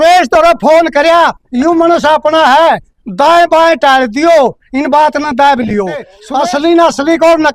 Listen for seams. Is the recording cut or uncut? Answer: cut